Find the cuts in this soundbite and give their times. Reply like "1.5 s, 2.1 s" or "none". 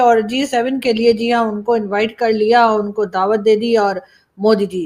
none